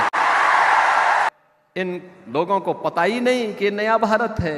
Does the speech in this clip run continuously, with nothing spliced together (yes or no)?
no